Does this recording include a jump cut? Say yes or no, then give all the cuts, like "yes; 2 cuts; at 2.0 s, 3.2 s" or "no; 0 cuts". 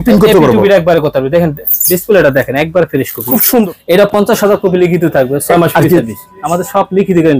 yes; 1 cut; at 3.6 s